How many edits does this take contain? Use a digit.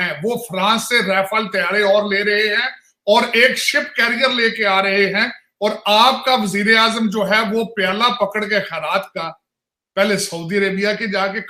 0